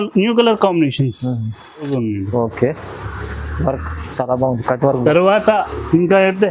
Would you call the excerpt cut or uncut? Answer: cut